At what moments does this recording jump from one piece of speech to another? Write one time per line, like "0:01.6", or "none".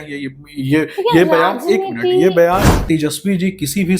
0:02.8